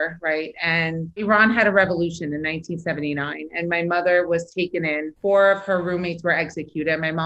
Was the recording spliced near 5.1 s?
yes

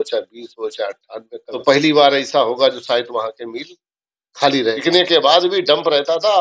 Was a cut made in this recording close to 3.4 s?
no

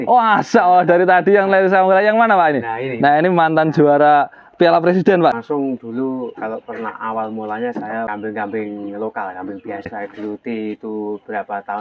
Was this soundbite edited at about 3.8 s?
no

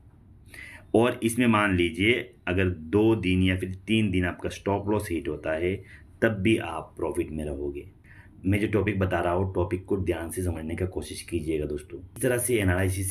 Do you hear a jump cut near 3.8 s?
no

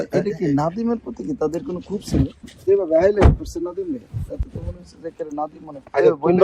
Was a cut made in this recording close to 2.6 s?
yes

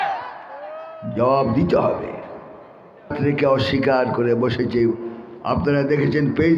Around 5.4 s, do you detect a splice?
no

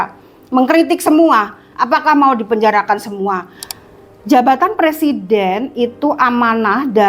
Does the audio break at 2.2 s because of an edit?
no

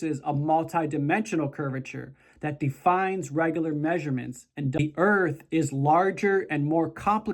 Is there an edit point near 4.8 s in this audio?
yes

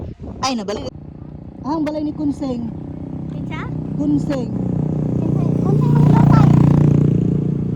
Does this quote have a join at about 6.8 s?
no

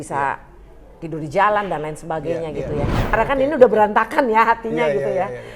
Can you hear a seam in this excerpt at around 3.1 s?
yes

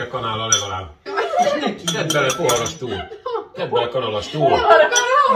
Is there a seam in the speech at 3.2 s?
no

